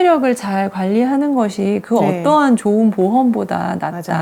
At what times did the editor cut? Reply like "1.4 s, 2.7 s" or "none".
none